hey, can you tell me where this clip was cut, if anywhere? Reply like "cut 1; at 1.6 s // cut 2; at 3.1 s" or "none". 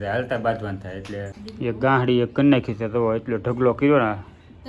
cut 1; at 1.4 s